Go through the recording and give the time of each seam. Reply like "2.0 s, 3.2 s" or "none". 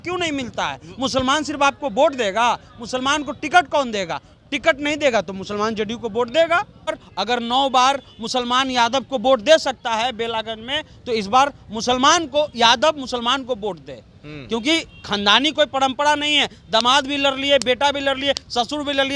7.0 s